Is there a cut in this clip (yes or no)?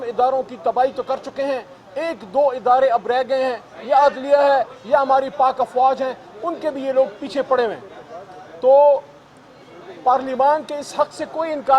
no